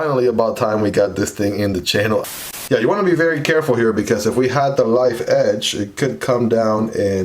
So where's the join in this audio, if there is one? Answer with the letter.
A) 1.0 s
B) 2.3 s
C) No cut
B